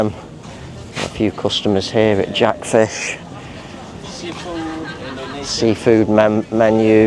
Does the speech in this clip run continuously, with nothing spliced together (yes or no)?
yes